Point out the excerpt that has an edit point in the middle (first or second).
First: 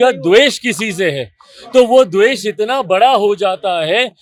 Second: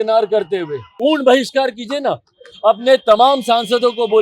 second